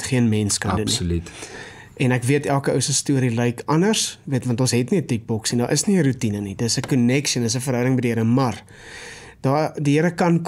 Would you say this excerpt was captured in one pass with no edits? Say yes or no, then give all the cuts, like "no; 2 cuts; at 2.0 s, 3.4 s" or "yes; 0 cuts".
yes; 0 cuts